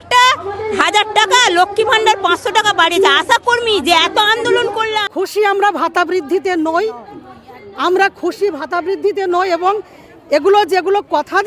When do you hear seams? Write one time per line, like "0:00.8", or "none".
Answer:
0:05.0